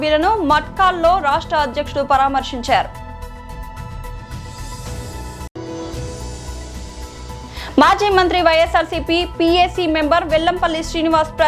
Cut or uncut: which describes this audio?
uncut